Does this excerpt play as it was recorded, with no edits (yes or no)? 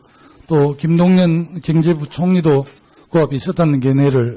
no